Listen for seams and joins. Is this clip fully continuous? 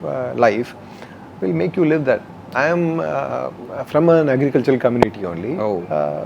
no; 1 cut; at 2.4 s

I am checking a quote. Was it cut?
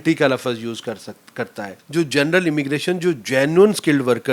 yes; 1 cut; at 1.8 s

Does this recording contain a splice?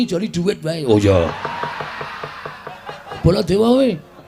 yes; 1 cut; at 3.2 s

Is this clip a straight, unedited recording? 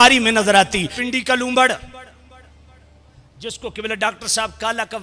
no; 1 cut; at 0.9 s

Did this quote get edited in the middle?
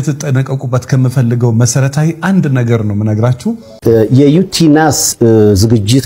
yes; 1 cut; at 3.7 s

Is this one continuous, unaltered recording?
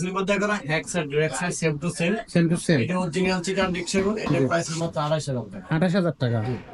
yes; 0 cuts

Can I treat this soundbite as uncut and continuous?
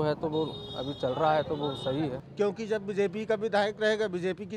no; 1 cut; at 2.2 s

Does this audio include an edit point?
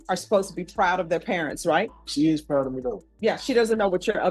yes; 2 cuts; at 2.0 s, 3.0 s

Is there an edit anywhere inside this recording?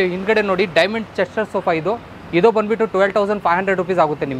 no; 0 cuts

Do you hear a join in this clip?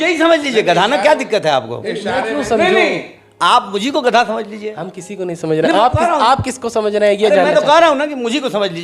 no; 0 cuts

